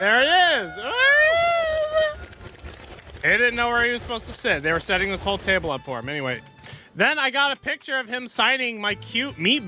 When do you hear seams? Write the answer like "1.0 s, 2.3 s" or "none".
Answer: none